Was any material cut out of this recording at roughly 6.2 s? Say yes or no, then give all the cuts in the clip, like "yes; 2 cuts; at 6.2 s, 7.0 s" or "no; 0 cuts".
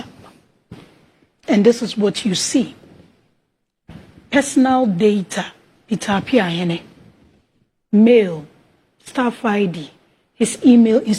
no; 0 cuts